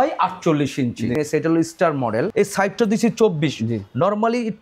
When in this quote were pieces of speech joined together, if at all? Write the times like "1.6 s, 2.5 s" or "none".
1.2 s, 2.3 s